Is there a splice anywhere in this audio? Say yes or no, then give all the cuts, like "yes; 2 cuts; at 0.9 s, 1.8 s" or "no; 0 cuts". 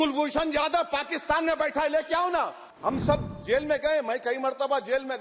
yes; 1 cut; at 2.6 s